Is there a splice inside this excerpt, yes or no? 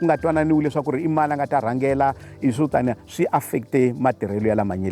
no